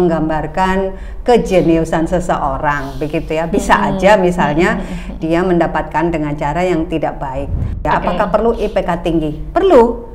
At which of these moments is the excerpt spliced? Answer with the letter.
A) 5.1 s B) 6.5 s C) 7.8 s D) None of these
C